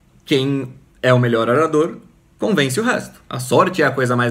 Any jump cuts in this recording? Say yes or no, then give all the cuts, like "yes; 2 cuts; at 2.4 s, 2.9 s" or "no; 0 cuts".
yes; 1 cut; at 3.3 s